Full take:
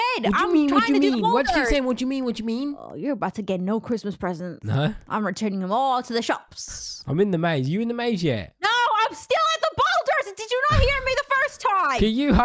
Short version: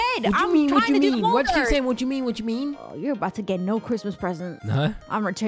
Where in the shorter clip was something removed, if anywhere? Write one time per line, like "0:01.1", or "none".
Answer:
none